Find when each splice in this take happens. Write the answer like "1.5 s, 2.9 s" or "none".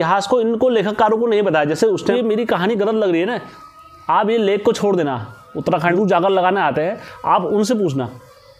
2.1 s, 6.0 s